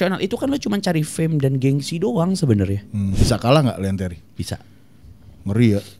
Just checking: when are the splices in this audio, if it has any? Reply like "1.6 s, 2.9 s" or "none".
3.1 s